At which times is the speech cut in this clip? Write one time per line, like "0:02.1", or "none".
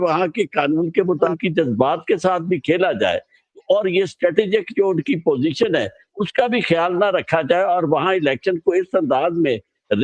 0:01.3